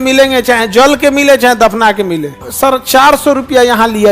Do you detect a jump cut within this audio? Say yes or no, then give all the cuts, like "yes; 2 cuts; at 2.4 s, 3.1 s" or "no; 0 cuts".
yes; 1 cut; at 2.4 s